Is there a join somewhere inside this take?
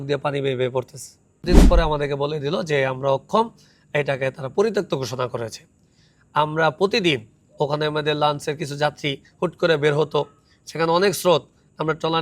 yes; 1 cut; at 1.4 s

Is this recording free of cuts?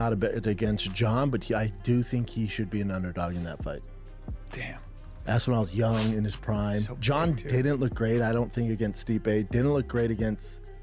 yes; 0 cuts

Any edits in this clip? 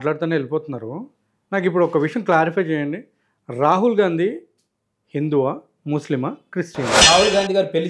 yes; 1 cut; at 7.0 s

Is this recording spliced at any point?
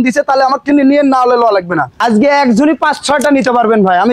yes; 1 cut; at 1.9 s

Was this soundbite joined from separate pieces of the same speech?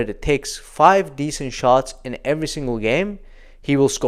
no; 0 cuts

